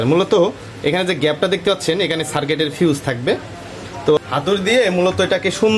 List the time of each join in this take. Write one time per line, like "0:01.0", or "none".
0:04.2